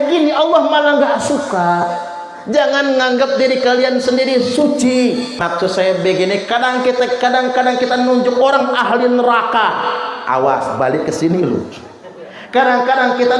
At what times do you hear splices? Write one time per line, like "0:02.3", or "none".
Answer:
0:05.4